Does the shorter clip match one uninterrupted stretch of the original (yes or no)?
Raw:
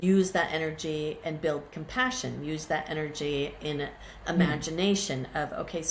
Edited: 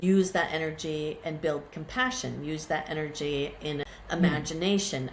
no